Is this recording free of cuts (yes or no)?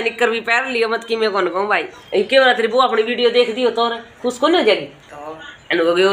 no